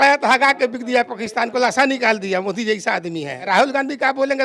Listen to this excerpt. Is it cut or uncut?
cut